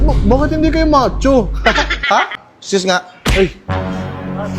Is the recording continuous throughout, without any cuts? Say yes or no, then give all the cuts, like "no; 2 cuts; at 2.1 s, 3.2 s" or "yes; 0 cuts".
no; 1 cut; at 2.3 s